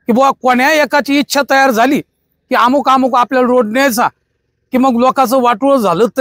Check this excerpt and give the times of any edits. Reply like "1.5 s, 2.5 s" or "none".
none